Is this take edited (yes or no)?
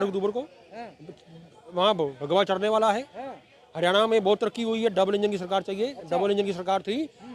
no